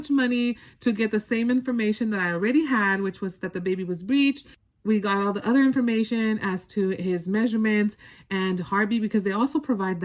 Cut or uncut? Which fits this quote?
uncut